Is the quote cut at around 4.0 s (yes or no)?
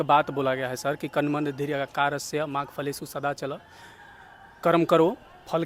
no